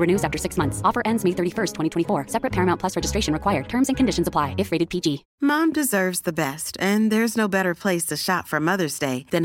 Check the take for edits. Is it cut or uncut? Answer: cut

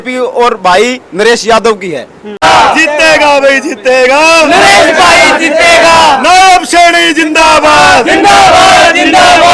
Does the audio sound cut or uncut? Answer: cut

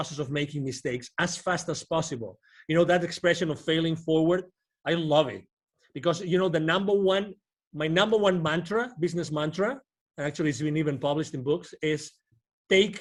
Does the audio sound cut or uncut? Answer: uncut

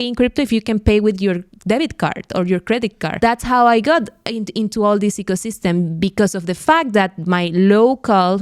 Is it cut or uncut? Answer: cut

